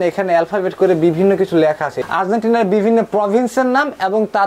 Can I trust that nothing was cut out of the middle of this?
no; 1 cut; at 2.0 s

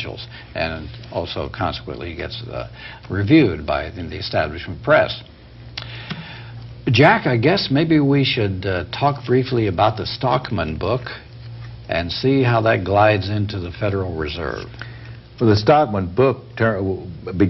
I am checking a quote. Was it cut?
no; 0 cuts

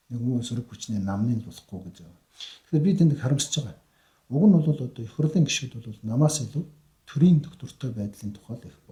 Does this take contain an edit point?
no; 0 cuts

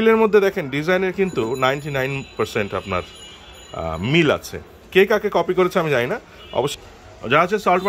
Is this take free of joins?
no; 1 cut; at 6.7 s

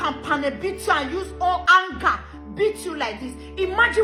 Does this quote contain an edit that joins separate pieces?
no; 0 cuts

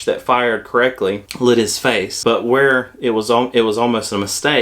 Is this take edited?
yes; 2 cuts; at 1.3 s, 2.2 s

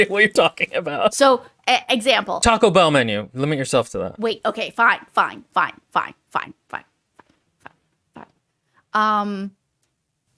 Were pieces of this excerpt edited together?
yes; 2 cuts; at 1.1 s, 4.1 s

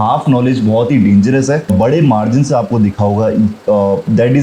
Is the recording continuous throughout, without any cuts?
no; 1 cut; at 1.7 s

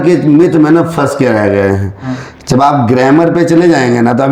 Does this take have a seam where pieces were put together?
no; 0 cuts

